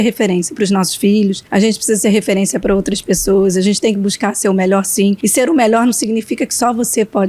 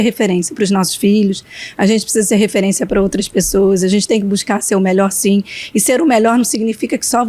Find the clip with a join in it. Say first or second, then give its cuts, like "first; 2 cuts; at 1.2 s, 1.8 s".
first; 2 cuts; at 1.4 s, 5.2 s